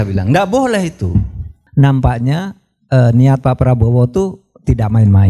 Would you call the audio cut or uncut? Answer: cut